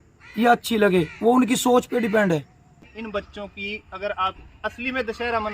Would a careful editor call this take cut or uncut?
cut